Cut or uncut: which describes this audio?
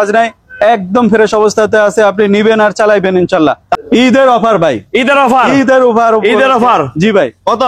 cut